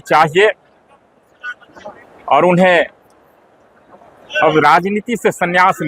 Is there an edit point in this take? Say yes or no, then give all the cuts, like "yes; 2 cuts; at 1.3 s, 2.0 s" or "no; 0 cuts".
no; 0 cuts